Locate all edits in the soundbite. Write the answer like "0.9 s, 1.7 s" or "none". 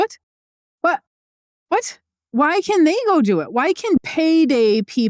4.0 s